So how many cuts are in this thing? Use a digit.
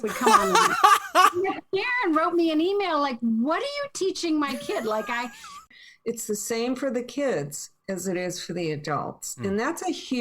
1